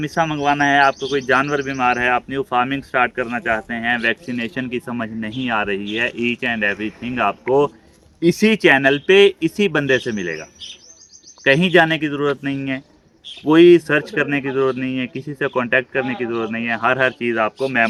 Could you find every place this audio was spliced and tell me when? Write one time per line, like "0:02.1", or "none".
none